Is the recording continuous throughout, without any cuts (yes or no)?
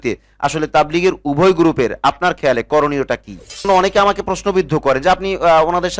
no